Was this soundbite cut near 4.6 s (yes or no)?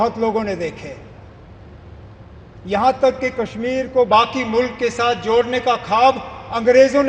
no